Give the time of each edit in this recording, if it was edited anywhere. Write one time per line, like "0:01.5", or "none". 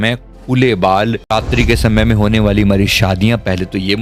0:01.7